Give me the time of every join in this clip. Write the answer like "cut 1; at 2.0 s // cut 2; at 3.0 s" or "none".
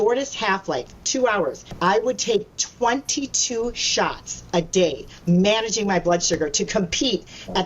cut 1; at 1.6 s